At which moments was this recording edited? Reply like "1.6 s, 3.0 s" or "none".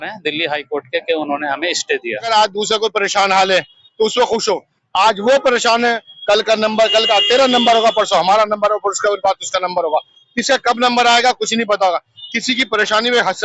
2.3 s